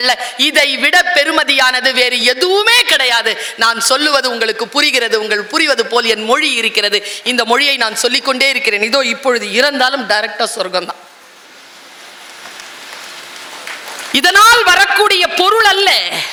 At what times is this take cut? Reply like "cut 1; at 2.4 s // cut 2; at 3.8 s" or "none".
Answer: none